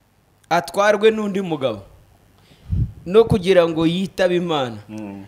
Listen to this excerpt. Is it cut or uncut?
uncut